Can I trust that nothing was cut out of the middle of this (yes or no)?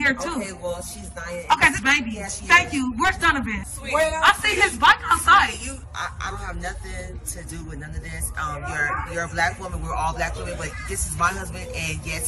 no